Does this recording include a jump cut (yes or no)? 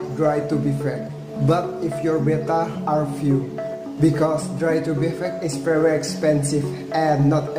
no